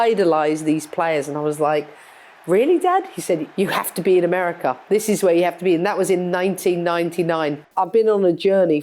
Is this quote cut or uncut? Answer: cut